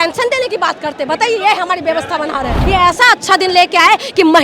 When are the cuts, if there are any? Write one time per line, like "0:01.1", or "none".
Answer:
0:02.6